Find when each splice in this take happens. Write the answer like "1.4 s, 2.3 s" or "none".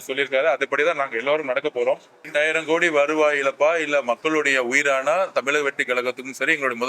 2.1 s